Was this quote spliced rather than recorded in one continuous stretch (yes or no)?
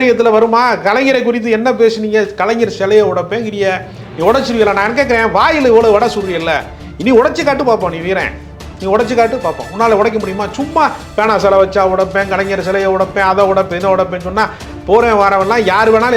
no